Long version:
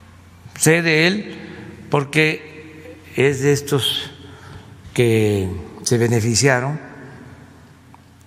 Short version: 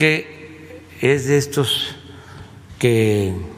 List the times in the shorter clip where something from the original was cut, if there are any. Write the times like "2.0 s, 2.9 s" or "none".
none